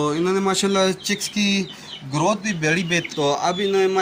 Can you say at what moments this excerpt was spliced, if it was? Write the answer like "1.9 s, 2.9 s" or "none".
3.1 s